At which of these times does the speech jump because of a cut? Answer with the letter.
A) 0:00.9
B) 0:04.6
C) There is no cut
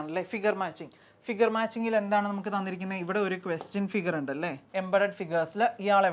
B